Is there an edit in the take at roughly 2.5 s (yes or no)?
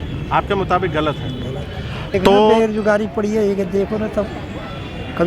yes